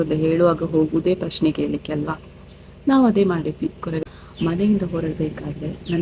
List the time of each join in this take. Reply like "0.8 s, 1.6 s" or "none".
4.1 s